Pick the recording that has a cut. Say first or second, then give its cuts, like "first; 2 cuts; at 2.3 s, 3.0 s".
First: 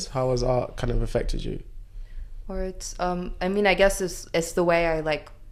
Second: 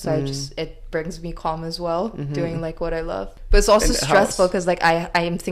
second; 1 cut; at 3.3 s